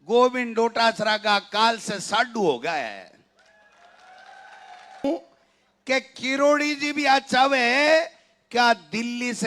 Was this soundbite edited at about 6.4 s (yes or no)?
no